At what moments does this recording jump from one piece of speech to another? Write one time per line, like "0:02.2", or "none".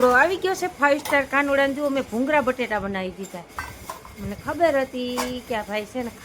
none